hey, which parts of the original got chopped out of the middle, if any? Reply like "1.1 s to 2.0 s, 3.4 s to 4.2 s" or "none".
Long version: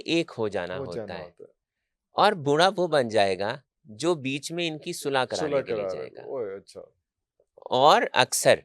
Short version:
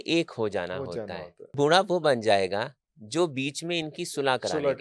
1.5 s to 2.4 s

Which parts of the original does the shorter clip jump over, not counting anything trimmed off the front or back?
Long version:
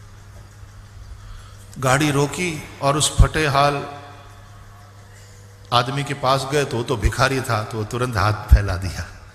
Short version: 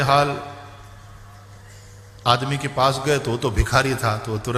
none

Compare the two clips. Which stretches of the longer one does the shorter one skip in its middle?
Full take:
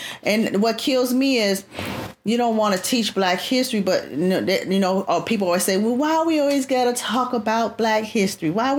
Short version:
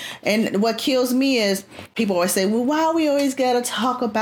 1.9 s to 5.2 s

